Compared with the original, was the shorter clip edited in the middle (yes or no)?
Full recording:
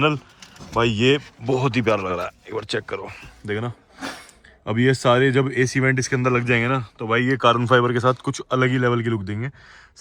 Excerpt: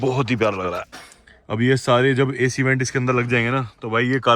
yes